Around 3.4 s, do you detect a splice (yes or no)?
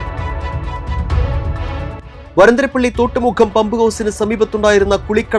no